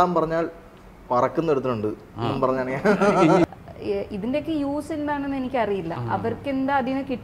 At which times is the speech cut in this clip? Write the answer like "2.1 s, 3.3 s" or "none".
3.4 s